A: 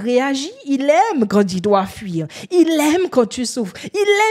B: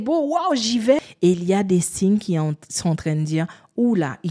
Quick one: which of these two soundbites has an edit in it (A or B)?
B